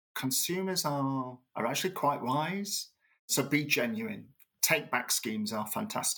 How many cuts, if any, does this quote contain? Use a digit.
2